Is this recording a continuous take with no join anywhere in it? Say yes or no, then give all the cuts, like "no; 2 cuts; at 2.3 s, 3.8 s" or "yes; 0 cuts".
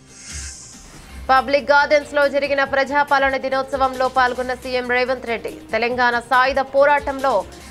no; 1 cut; at 1.3 s